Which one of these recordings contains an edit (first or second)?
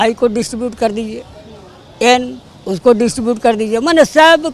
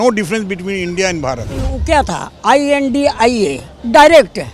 second